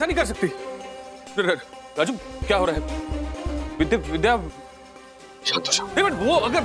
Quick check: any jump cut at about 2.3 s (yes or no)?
no